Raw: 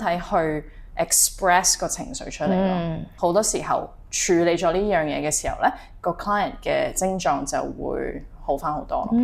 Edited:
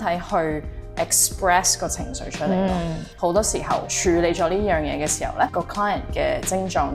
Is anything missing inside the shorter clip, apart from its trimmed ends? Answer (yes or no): yes